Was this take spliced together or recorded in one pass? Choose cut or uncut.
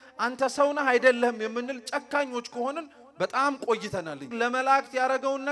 cut